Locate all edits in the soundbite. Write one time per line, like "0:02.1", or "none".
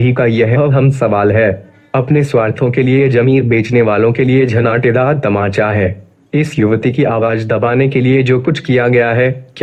none